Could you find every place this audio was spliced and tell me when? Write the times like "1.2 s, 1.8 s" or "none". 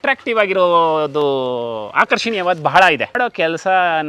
3.2 s